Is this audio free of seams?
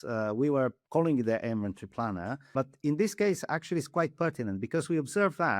no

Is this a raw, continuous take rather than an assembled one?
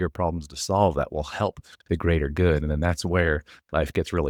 yes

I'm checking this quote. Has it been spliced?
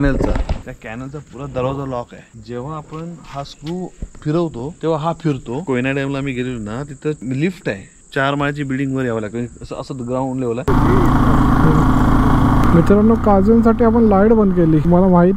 yes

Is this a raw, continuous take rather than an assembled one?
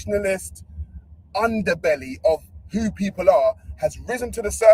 yes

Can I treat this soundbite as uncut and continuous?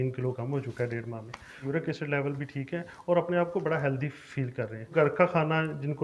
no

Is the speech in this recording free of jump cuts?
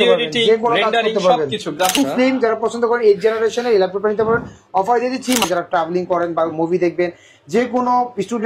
no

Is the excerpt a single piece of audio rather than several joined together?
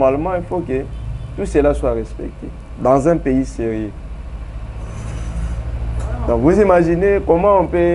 yes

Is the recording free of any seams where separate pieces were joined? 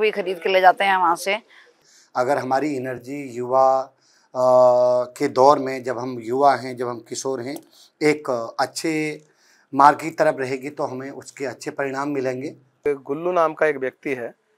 no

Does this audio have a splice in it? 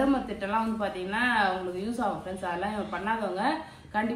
no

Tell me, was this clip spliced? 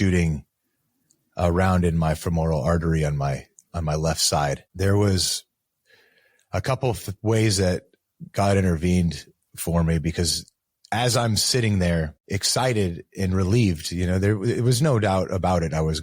yes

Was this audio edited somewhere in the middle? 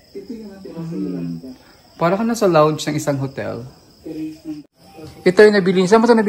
yes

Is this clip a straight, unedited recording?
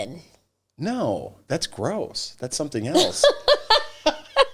yes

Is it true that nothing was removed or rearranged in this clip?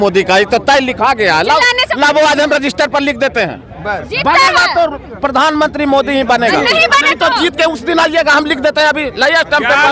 yes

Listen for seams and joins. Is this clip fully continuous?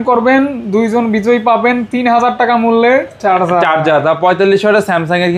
yes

